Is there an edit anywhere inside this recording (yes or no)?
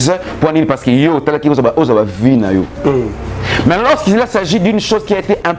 no